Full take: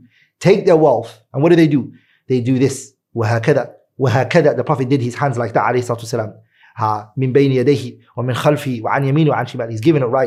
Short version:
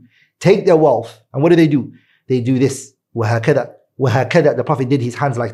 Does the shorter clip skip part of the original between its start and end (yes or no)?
no